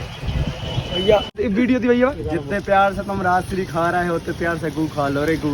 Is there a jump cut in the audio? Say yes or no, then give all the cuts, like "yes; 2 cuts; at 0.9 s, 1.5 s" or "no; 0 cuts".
yes; 1 cut; at 1.3 s